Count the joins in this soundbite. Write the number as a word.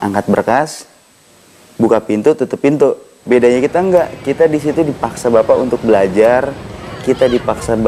zero